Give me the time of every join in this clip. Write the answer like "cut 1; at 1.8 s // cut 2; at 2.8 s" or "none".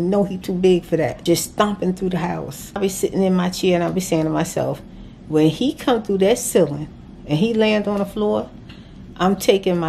cut 1; at 1.2 s // cut 2; at 2.8 s